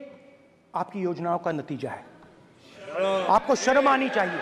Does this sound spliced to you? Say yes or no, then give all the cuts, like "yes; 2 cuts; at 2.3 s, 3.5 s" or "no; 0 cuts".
no; 0 cuts